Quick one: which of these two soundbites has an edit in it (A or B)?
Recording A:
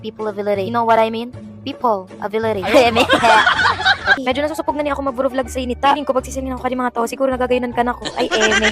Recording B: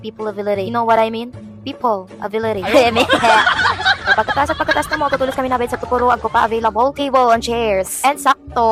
A